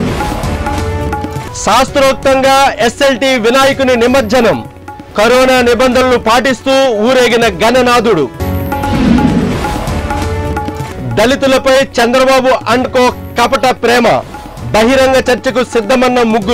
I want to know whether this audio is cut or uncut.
cut